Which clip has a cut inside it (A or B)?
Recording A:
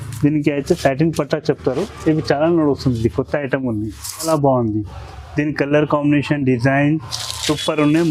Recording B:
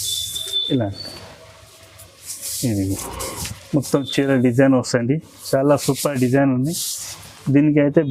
A